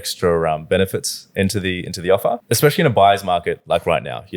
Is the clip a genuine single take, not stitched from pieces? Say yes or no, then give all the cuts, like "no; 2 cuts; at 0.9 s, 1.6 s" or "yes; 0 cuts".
no; 1 cut; at 2.4 s